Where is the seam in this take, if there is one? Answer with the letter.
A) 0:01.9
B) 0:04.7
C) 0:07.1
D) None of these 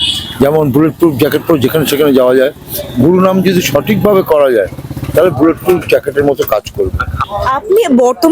C